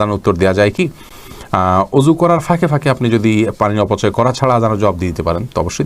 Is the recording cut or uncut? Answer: uncut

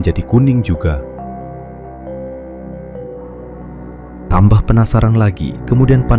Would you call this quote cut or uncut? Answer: uncut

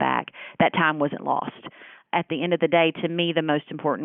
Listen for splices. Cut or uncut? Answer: cut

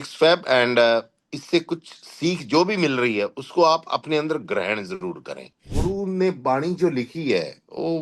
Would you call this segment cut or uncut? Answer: cut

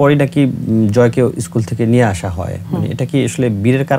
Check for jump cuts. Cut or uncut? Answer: uncut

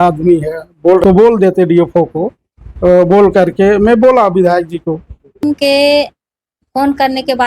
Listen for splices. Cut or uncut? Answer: cut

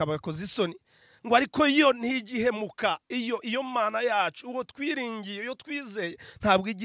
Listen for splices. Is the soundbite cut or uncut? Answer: uncut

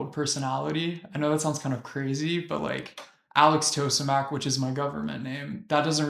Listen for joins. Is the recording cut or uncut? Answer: uncut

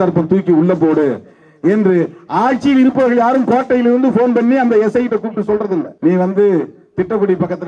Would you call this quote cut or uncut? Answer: cut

